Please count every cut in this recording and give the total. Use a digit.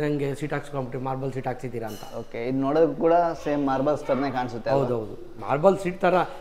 0